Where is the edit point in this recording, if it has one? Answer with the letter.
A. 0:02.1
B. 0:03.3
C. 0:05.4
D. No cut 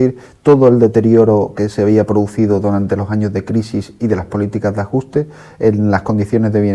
A